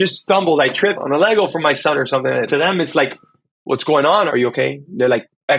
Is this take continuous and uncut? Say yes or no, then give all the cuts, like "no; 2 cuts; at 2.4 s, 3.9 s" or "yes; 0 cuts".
no; 3 cuts; at 1.0 s, 2.5 s, 4.3 s